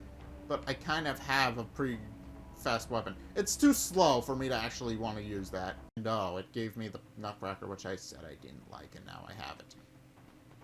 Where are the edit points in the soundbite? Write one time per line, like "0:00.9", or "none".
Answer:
0:06.0